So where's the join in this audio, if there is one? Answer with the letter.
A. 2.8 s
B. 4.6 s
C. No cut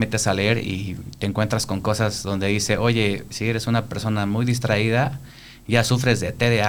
C